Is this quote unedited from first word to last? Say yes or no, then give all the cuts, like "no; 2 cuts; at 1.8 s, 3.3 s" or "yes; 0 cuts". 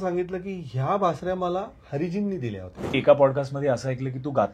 no; 1 cut; at 2.9 s